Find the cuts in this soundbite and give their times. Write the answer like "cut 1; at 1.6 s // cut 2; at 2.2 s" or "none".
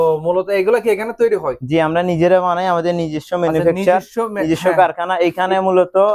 none